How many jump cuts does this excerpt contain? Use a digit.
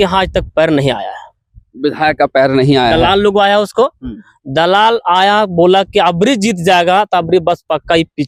0